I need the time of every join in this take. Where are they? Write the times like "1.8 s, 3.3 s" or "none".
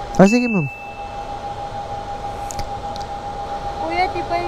3.5 s